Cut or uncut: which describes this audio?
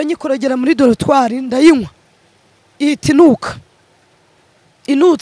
uncut